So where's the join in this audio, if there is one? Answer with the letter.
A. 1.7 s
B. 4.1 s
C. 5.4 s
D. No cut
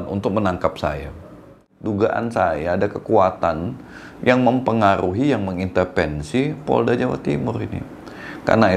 A